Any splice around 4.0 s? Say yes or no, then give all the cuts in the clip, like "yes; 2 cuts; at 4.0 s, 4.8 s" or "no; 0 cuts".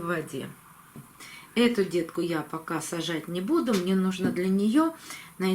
no; 1 cut; at 1.0 s